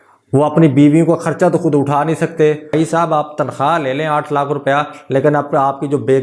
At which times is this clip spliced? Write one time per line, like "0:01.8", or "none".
0:02.7